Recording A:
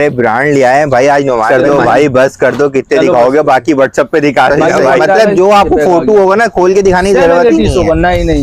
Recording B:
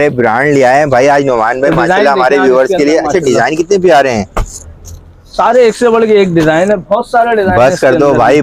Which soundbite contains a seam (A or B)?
A